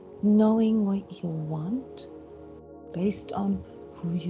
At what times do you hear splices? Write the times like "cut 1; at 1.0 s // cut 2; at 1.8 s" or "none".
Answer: none